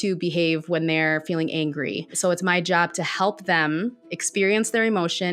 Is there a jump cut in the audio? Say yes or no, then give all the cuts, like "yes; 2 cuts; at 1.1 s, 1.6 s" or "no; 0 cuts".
yes; 1 cut; at 2.1 s